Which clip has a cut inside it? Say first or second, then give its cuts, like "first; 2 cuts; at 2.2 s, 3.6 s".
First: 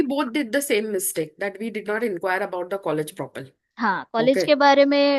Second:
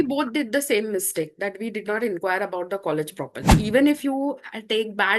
second; 1 cut; at 3.5 s